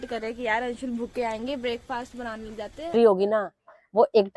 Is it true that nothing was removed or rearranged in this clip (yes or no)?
no